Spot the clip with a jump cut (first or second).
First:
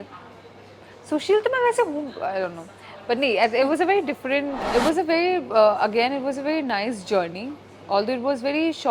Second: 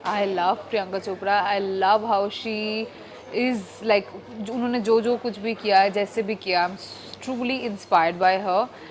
first